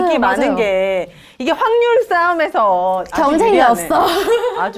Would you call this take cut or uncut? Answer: uncut